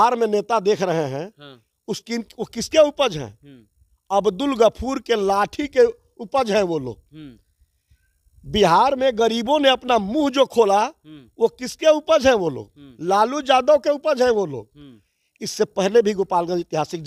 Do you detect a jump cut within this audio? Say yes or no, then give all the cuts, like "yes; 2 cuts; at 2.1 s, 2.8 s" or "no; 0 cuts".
no; 0 cuts